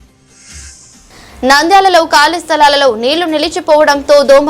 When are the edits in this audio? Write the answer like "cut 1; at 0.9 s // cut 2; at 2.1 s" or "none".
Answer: cut 1; at 1.1 s